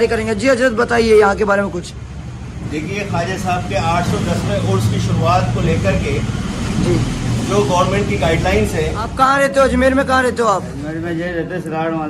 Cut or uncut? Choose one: cut